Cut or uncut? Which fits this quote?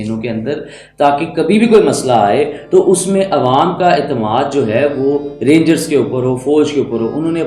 uncut